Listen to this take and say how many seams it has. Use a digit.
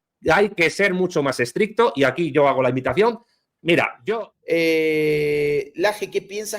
1